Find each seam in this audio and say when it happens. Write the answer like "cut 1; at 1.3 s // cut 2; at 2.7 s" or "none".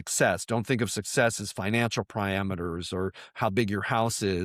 none